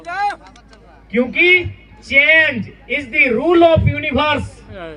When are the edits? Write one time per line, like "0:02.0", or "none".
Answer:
none